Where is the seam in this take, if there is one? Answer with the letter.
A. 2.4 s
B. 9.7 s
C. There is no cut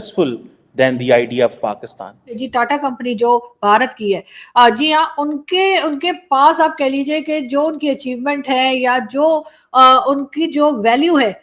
A